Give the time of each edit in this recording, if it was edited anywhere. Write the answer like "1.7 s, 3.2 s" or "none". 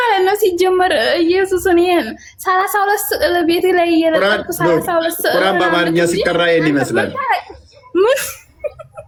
none